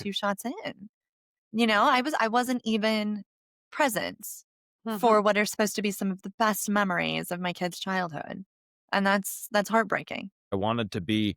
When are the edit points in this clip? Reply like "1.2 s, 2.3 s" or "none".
10.5 s

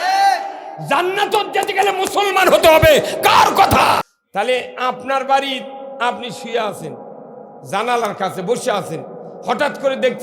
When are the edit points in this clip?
4.1 s

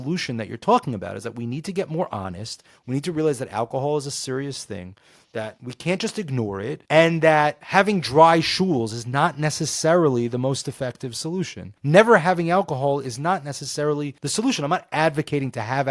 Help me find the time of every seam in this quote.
11.7 s, 14.2 s

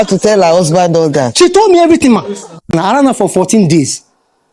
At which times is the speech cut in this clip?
2.7 s

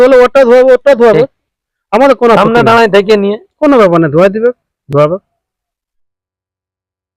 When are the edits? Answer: none

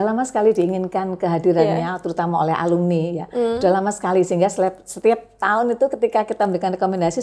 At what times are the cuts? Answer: none

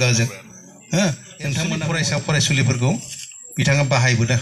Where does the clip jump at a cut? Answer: 1.8 s

